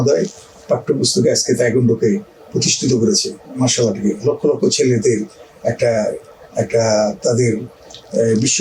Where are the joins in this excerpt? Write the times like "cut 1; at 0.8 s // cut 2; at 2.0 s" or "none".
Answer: none